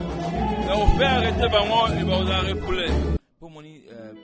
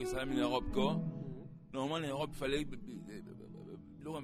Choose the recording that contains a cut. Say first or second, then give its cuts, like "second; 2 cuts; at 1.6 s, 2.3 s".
first; 1 cut; at 3.2 s